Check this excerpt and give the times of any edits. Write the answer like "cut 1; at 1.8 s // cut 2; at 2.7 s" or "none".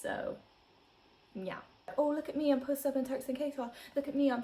cut 1; at 1.9 s